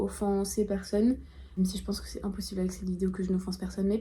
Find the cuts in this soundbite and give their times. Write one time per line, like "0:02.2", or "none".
none

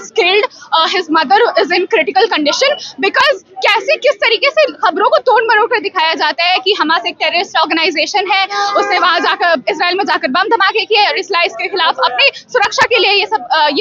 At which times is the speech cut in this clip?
none

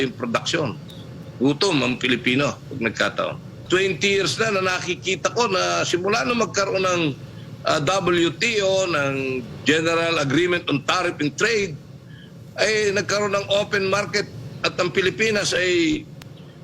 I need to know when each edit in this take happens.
0:03.6

